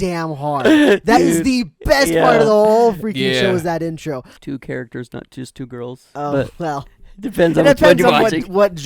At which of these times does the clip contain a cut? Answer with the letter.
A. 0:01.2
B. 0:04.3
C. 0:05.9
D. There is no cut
B